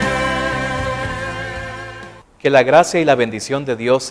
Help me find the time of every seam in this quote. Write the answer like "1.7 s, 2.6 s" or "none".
2.0 s